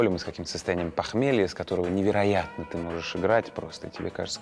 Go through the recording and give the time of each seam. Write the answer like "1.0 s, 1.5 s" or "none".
none